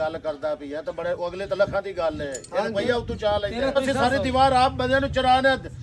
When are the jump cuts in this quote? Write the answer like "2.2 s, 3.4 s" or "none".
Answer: 3.8 s